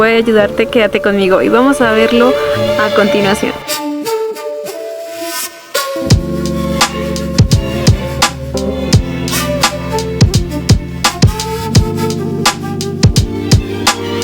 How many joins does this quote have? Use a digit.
1